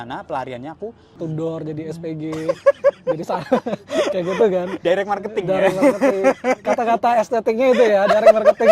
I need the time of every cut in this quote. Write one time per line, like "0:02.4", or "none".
0:01.2